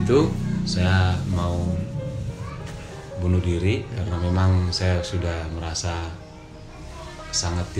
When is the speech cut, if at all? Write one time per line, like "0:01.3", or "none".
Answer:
none